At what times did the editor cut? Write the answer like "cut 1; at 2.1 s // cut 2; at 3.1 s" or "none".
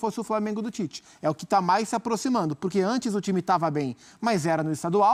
none